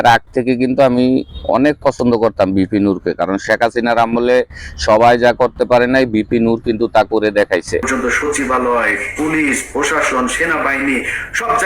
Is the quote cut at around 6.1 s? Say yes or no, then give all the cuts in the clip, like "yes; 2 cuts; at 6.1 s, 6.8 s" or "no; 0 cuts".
no; 1 cut; at 7.8 s